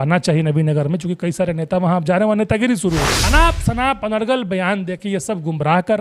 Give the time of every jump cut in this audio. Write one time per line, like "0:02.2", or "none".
0:03.1